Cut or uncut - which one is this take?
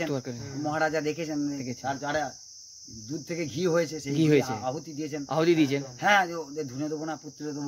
uncut